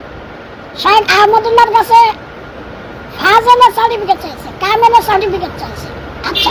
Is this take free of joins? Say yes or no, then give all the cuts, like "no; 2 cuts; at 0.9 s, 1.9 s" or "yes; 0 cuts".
yes; 0 cuts